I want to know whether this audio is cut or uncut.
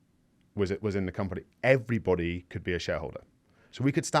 uncut